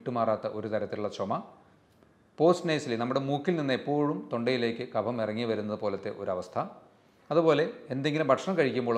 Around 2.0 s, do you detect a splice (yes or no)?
no